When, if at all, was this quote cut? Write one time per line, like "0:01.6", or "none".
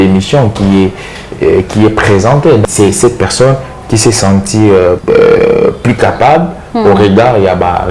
0:02.6
0:05.0

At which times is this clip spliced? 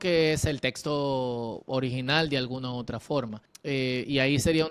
0:03.5

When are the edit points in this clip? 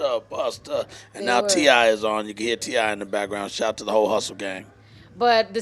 0:02.1

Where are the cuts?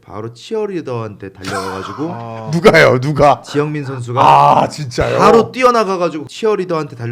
0:06.2

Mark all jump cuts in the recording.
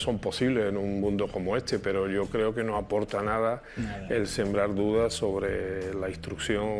none

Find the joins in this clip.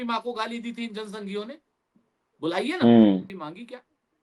0:03.3

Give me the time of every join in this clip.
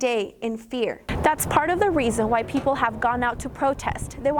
0:01.1

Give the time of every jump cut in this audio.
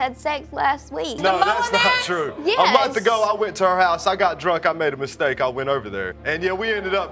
0:01.2
0:06.1

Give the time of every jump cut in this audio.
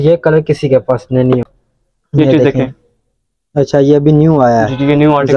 0:01.5

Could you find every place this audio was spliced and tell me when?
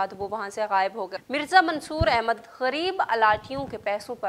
0:01.1

